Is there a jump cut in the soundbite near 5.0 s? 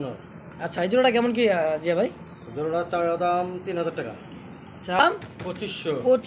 yes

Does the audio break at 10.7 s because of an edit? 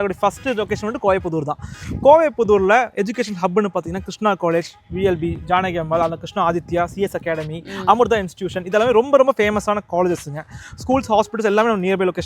no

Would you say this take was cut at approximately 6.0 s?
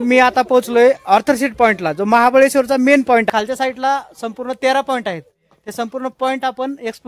no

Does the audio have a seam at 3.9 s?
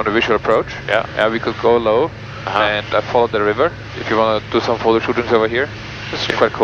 yes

